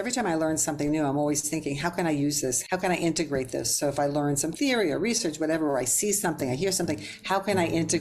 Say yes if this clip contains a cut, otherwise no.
yes